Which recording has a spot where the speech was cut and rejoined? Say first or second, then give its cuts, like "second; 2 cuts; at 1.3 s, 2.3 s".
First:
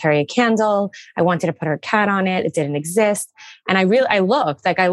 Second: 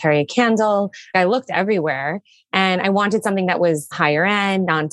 second; 2 cuts; at 1.1 s, 3.9 s